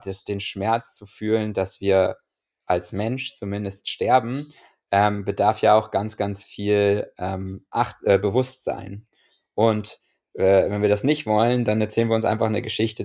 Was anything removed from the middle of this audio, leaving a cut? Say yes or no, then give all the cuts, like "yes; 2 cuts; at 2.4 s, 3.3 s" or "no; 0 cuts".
no; 0 cuts